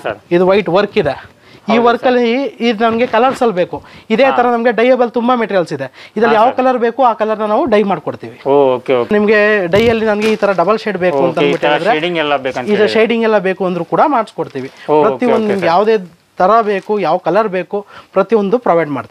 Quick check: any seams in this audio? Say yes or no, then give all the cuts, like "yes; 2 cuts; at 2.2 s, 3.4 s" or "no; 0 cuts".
yes; 1 cut; at 9.1 s